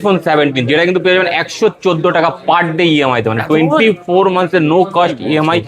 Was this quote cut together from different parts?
no; 0 cuts

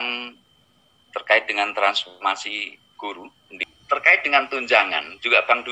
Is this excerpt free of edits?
no; 1 cut; at 3.7 s

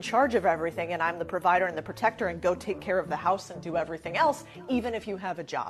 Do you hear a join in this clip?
no; 0 cuts

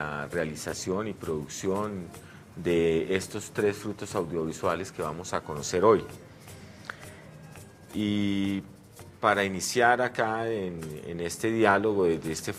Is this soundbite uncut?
yes; 0 cuts

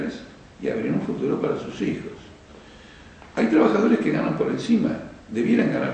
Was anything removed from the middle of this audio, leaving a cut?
yes; 1 cut; at 4.4 s

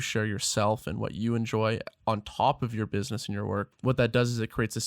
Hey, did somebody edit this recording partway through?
yes; 1 cut; at 3.7 s

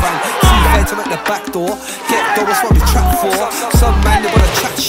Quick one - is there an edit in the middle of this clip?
no; 0 cuts

